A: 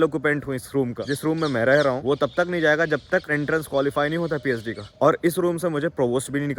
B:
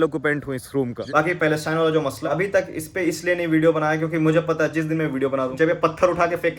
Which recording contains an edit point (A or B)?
B